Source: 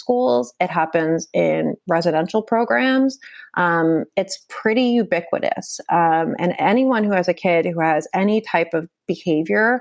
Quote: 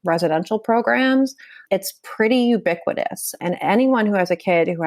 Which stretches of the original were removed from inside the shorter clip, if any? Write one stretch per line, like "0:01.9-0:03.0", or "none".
0:03.4-0:04.1
0:05.8-0:06.3